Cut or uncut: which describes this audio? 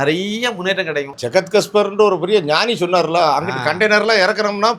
cut